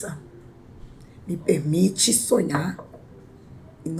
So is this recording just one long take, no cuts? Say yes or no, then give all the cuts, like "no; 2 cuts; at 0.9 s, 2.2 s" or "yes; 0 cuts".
yes; 0 cuts